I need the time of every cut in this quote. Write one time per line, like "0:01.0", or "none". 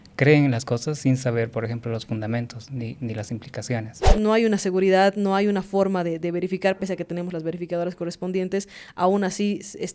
0:04.1